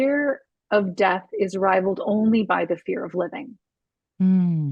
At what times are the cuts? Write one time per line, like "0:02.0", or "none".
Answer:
none